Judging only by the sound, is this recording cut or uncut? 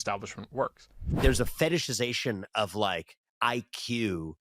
cut